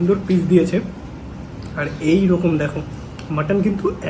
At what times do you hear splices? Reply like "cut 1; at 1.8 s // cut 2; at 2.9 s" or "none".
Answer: none